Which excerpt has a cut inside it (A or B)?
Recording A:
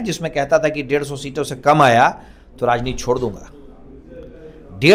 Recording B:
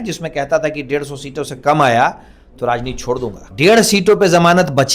B